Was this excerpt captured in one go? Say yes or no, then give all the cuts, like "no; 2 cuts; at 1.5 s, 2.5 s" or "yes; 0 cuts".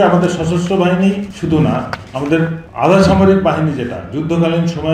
no; 2 cuts; at 1.3 s, 2.6 s